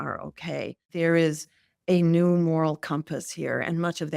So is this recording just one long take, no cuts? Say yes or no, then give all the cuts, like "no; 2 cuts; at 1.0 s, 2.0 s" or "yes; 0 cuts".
no; 1 cut; at 0.9 s